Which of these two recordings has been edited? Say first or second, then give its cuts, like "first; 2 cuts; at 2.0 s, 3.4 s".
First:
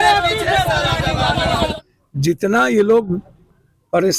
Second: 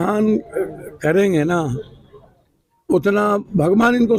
first; 1 cut; at 1.7 s